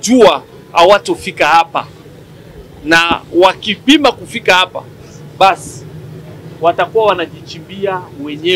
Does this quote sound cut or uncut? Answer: uncut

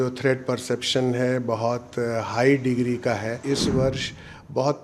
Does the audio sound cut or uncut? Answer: cut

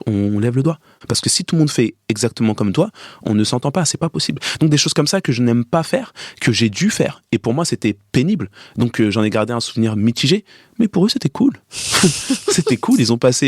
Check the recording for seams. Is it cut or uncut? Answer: cut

